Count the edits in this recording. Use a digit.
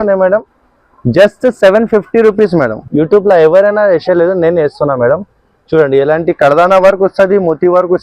1